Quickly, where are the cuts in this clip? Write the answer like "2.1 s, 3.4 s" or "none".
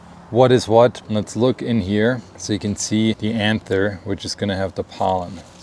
1.0 s, 2.3 s, 3.2 s